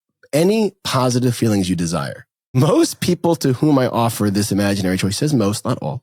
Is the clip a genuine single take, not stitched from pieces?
no; 1 cut; at 2.5 s

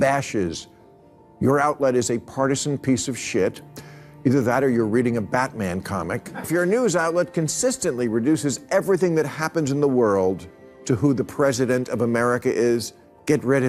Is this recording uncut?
no; 1 cut; at 6.2 s

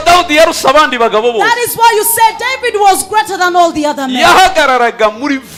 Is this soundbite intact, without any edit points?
yes; 0 cuts

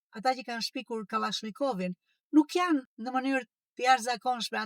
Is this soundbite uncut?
yes; 0 cuts

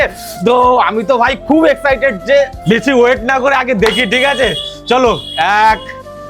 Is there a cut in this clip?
yes; 1 cut; at 2.5 s

